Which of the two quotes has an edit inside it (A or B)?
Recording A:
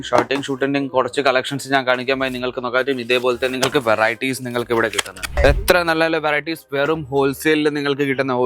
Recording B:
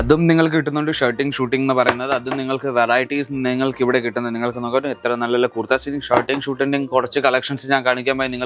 A